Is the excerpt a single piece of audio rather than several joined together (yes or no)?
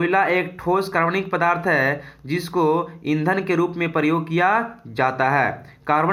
yes